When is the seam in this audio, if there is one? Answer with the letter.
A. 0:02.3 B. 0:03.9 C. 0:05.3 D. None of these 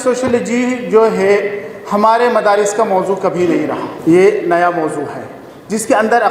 B